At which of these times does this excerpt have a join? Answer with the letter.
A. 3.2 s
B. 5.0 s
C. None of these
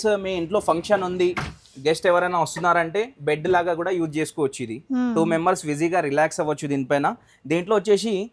C